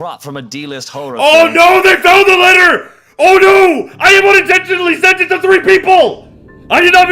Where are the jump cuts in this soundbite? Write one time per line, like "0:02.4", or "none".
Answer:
0:01.2